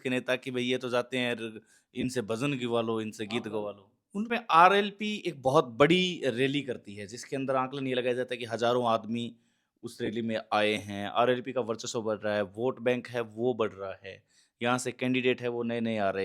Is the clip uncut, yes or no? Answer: no